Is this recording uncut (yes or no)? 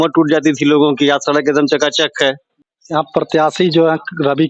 yes